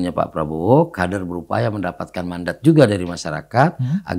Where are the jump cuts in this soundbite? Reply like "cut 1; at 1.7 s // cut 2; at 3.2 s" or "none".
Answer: none